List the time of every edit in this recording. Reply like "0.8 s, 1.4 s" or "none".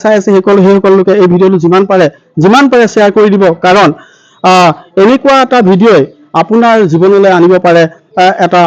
none